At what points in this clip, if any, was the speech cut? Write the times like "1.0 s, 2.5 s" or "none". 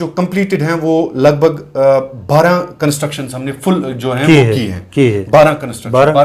none